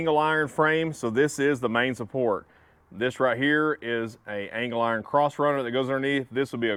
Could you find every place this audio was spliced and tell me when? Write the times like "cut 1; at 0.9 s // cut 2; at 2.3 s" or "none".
none